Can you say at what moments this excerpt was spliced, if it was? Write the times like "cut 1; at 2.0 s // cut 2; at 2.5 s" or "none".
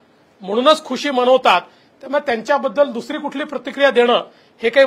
none